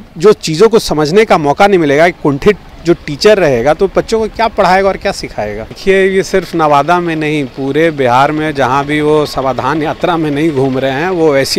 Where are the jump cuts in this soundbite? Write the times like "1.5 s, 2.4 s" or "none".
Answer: 5.8 s